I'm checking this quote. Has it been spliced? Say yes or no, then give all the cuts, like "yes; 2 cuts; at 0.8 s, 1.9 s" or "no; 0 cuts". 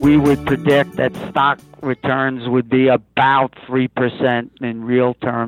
yes; 1 cut; at 0.9 s